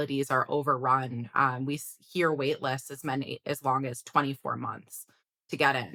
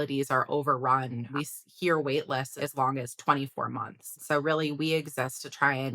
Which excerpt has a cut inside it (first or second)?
second